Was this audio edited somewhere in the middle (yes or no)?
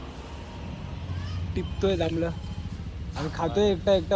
no